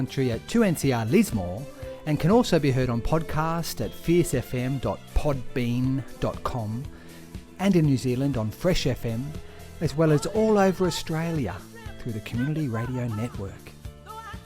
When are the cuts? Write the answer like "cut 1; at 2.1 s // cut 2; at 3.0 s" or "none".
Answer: cut 1; at 13.5 s